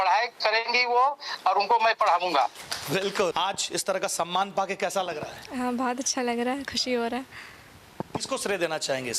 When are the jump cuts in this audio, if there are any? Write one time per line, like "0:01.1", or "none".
0:03.3